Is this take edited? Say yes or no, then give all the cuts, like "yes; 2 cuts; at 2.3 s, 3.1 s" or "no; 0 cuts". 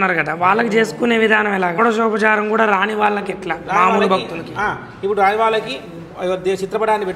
yes; 1 cut; at 1.8 s